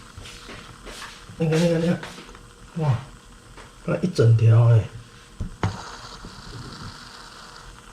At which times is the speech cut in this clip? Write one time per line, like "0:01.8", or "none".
0:01.4